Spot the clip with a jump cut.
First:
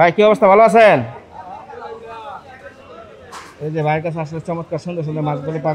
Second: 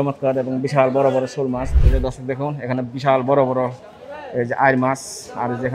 second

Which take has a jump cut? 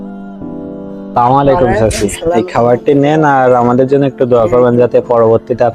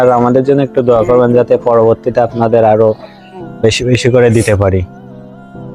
first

